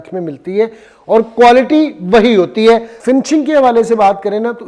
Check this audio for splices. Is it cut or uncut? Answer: cut